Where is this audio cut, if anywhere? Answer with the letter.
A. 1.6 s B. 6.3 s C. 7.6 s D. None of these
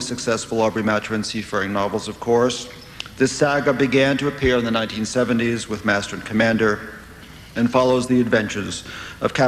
A